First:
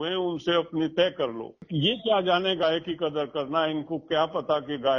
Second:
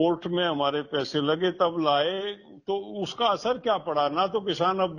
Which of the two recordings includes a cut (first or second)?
first